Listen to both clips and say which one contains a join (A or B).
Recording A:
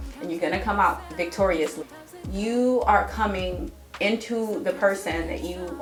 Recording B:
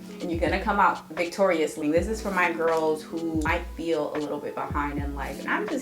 B